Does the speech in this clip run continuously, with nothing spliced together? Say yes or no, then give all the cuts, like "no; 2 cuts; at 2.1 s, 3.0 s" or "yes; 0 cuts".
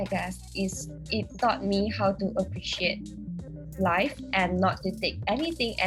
yes; 0 cuts